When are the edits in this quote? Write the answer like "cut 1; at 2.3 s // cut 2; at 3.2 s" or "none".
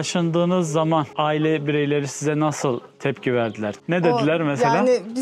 cut 1; at 1.1 s // cut 2; at 3.7 s